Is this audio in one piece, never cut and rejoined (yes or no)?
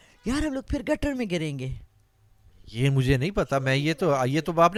yes